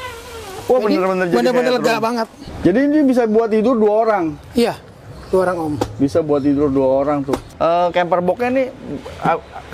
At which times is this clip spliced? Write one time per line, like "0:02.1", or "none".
0:02.5
0:07.5